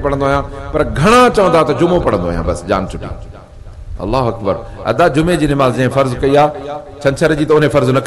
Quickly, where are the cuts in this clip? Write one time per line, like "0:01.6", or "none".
none